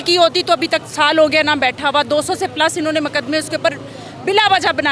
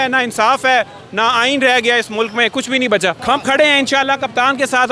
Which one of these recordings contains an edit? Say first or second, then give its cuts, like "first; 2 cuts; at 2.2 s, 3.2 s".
second; 1 cut; at 3.2 s